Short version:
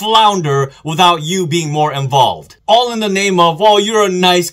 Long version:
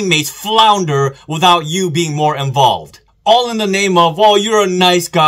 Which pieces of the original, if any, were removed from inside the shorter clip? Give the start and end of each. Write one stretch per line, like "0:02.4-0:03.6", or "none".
0:02.9-0:03.1